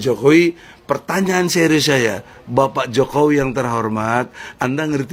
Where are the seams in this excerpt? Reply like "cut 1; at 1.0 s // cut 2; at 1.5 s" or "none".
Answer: none